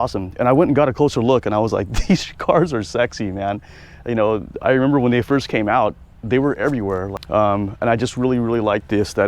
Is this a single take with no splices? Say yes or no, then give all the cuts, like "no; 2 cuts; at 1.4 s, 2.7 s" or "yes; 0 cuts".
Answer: no; 1 cut; at 7.1 s